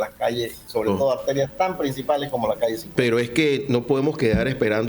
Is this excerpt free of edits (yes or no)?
yes